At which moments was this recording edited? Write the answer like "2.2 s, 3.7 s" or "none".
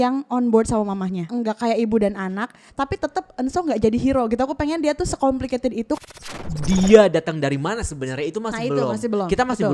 1.2 s, 6.3 s